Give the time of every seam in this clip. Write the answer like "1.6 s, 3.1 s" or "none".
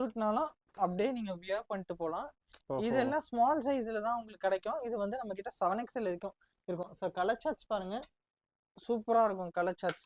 none